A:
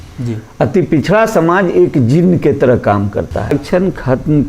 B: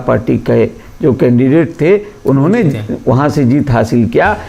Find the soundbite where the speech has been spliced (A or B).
A